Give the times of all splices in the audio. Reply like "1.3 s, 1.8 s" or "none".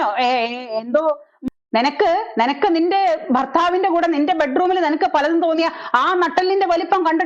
1.3 s